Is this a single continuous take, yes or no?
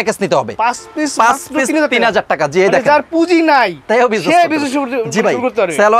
yes